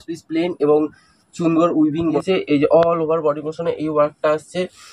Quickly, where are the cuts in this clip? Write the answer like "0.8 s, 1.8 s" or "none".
2.2 s